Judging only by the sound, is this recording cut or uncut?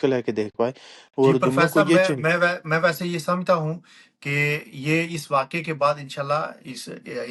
uncut